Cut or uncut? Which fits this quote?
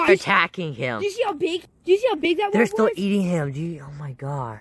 cut